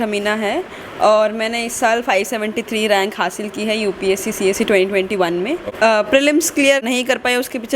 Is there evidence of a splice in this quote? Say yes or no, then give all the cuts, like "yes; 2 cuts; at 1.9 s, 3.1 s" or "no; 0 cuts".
yes; 2 cuts; at 5.7 s, 6.8 s